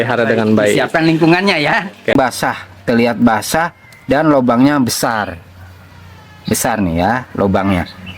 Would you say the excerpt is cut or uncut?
cut